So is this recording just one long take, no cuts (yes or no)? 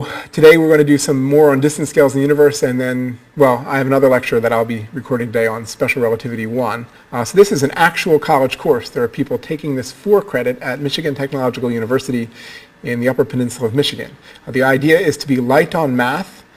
yes